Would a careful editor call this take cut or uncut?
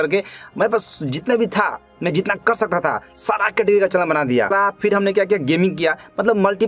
cut